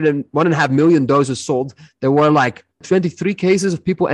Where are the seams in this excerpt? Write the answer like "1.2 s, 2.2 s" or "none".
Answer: 2.8 s